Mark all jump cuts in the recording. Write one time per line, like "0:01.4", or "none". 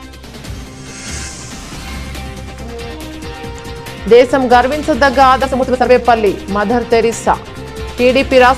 0:01.2